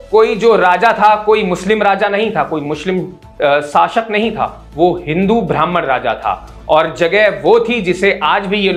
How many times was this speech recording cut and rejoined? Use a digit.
0